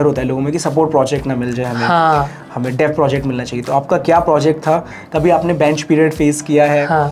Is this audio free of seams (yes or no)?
yes